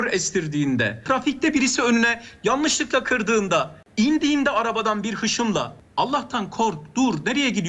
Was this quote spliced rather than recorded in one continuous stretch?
yes; 3 cuts; at 1.0 s, 3.8 s, 5.8 s

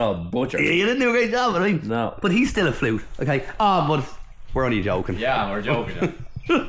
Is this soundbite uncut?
yes; 0 cuts

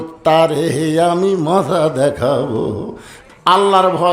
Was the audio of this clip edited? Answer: yes; 1 cut; at 3.2 s

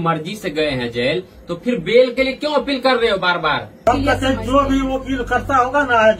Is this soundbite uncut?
no; 1 cut; at 3.9 s

